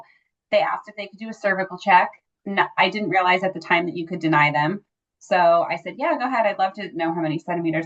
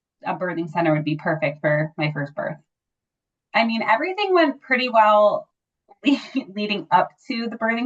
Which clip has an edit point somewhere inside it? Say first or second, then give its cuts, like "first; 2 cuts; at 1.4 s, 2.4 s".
second; 1 cut; at 3.2 s